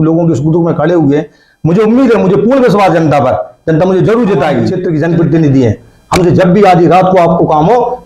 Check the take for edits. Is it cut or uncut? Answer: cut